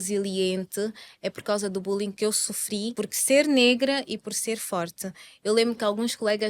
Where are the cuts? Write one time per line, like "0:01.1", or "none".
0:02.1
0:02.9